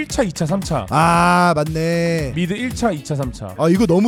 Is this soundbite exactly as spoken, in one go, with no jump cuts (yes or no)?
yes